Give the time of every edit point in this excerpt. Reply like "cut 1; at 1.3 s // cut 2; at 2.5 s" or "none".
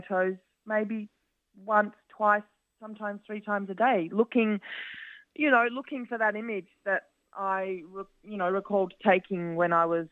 none

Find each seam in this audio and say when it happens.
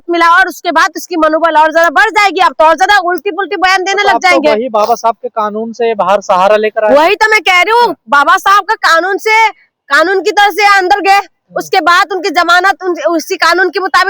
none

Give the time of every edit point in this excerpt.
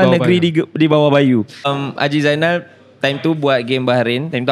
cut 1; at 1.7 s

